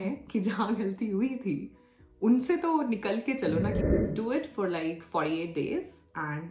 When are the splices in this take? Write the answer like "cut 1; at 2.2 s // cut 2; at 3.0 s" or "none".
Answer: cut 1; at 3.7 s